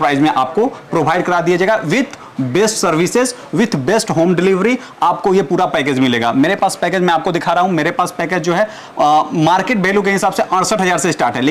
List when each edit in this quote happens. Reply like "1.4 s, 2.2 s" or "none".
none